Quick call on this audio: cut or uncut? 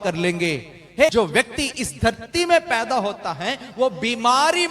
cut